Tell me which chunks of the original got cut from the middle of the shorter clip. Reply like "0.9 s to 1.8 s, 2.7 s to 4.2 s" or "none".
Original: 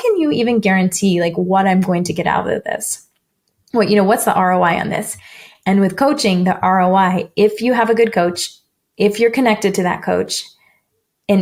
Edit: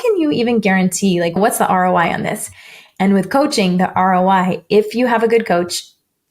1.4 s to 4.0 s